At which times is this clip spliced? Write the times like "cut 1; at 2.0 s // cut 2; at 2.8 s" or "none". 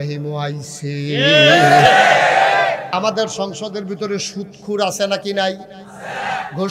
cut 1; at 2.9 s